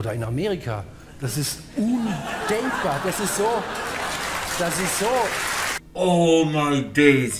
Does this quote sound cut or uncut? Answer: cut